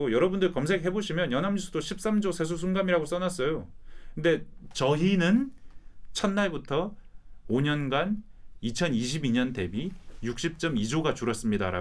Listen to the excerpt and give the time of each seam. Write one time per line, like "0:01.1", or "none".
none